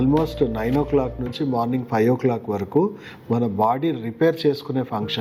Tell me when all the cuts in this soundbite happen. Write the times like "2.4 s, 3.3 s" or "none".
none